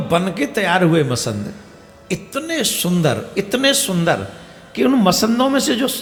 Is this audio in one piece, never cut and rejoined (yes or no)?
yes